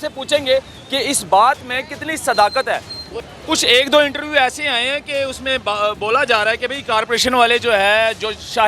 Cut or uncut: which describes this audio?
cut